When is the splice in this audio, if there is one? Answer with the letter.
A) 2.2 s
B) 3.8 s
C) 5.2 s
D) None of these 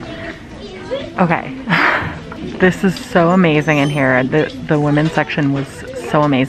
A